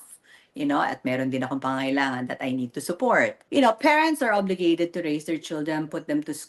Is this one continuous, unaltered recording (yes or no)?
no